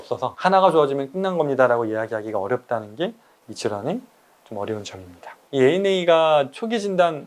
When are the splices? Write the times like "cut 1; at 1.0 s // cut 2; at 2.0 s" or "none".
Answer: cut 1; at 5.3 s